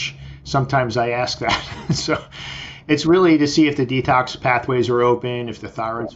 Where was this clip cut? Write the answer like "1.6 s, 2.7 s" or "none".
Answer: none